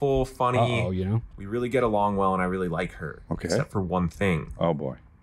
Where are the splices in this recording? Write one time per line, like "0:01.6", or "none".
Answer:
0:01.2